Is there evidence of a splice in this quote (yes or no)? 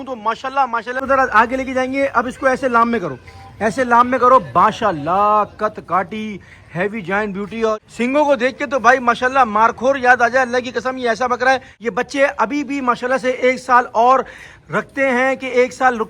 yes